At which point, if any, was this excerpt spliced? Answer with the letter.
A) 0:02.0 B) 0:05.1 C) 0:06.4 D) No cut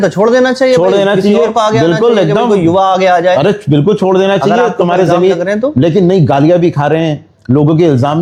D